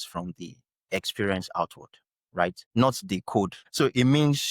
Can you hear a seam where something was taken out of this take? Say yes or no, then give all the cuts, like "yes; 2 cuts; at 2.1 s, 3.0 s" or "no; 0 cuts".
yes; 2 cuts; at 2.6 s, 3.6 s